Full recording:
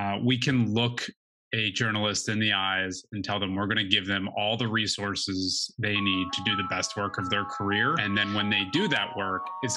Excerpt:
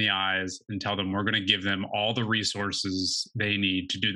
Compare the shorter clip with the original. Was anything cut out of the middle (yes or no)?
no